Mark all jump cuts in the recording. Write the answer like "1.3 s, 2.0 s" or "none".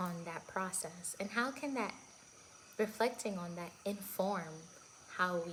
none